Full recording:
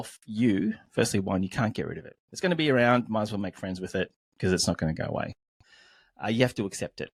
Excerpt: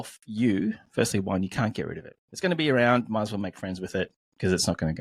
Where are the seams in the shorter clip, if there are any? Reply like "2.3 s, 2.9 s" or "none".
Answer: none

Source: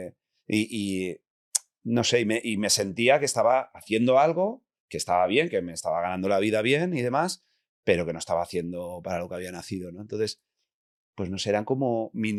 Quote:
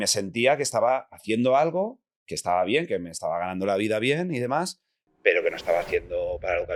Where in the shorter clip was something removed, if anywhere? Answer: none

